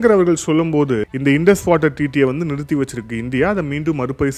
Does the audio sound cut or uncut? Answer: cut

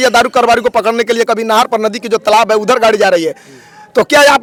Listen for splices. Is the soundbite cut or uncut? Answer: uncut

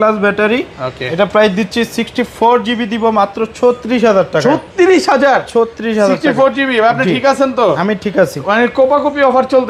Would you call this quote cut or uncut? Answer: uncut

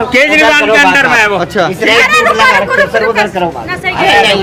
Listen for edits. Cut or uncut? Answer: uncut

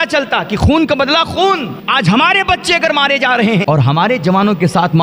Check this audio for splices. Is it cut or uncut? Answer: cut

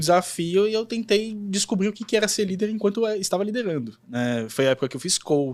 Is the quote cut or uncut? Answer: uncut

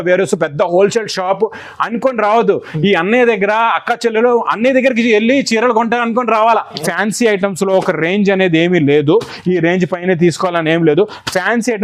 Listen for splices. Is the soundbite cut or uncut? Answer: cut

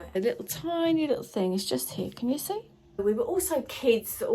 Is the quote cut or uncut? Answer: cut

